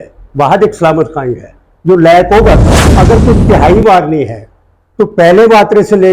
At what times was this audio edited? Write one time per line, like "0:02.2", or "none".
0:02.8